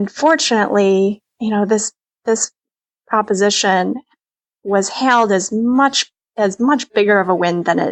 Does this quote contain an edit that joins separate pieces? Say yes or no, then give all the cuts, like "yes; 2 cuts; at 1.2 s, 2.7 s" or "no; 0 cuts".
yes; 1 cut; at 1.3 s